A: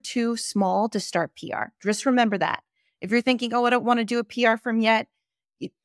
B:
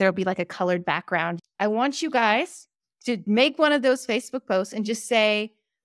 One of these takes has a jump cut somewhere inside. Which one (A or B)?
B